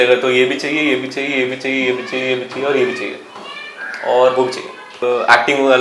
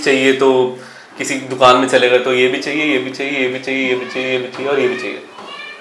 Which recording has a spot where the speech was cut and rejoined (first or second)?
first